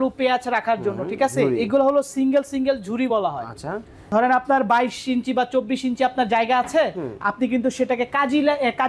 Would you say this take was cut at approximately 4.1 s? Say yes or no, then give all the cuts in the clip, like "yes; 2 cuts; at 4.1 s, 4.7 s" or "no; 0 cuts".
yes; 1 cut; at 4.1 s